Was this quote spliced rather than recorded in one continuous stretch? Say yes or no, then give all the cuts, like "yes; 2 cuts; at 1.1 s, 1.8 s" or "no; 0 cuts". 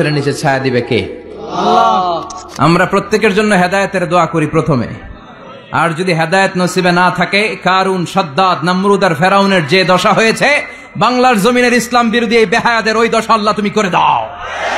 yes; 1 cut; at 2.5 s